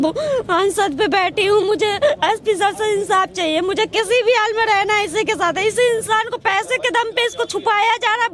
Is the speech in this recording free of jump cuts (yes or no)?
yes